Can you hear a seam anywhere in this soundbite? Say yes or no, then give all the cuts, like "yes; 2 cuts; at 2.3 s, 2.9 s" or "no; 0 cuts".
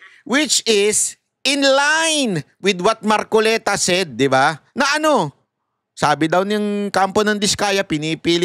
no; 0 cuts